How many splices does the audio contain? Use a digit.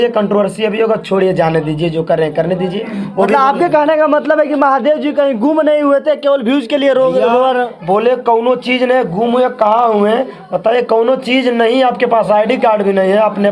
0